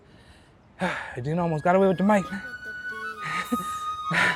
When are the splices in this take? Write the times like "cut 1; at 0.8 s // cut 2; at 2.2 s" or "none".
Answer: none